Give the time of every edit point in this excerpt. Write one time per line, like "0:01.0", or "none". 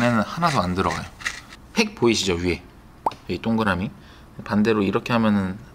0:01.5